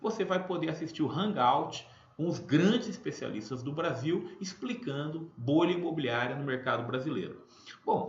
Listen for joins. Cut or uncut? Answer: cut